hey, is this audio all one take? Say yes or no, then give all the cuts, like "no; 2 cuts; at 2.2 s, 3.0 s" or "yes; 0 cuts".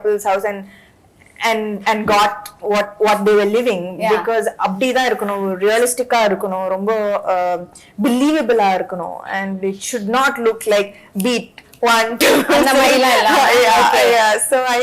yes; 0 cuts